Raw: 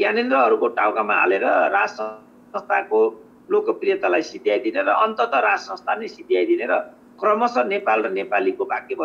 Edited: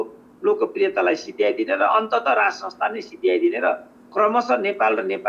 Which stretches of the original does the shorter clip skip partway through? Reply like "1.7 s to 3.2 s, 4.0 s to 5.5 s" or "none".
none